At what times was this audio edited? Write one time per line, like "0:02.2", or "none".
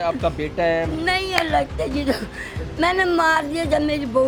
none